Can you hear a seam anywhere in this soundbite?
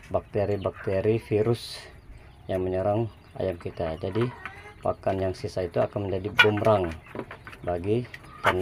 no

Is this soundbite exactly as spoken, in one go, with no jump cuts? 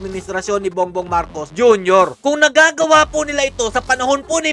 no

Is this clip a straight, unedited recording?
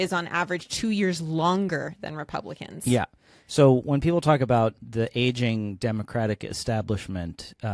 yes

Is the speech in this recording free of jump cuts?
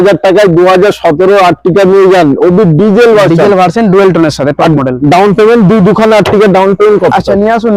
yes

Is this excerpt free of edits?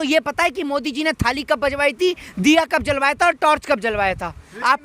yes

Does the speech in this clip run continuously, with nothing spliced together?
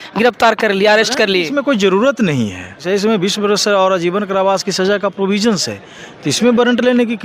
no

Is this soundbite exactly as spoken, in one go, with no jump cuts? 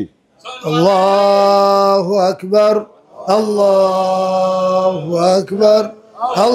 yes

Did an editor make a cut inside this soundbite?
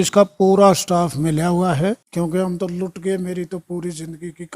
yes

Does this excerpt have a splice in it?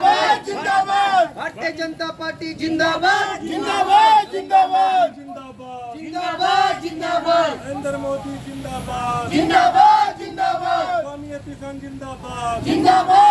no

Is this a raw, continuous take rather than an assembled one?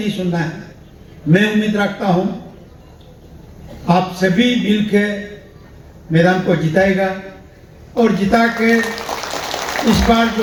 yes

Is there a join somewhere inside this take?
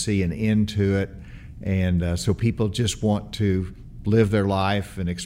no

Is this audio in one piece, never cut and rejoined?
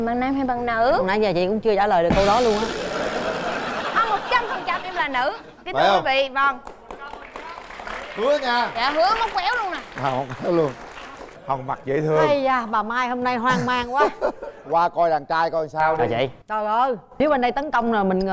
yes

